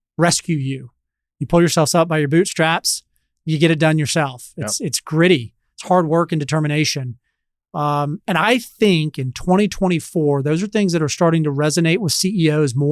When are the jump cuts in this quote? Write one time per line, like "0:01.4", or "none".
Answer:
none